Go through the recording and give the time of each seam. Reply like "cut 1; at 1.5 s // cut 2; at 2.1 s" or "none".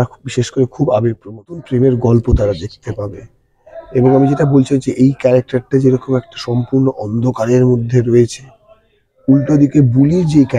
cut 1; at 1.7 s